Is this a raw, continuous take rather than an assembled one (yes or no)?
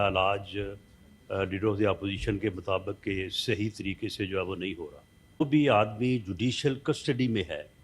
no